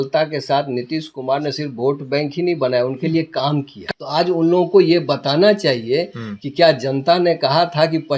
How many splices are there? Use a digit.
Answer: 1